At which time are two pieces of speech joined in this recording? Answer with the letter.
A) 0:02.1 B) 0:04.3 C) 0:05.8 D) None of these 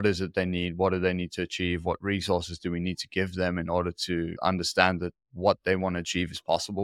B